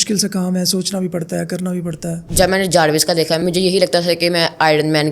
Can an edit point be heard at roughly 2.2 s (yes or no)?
yes